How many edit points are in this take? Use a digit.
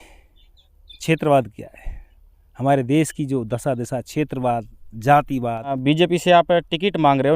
1